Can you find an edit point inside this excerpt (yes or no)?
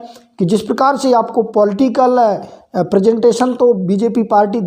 no